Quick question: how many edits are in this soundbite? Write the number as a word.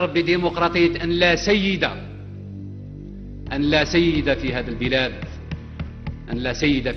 zero